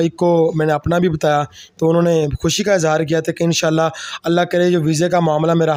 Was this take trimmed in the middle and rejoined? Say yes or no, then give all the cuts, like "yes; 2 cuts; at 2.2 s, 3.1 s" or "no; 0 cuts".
no; 0 cuts